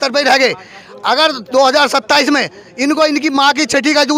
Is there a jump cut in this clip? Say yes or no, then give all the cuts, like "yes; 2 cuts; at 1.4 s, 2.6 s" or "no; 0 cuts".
no; 0 cuts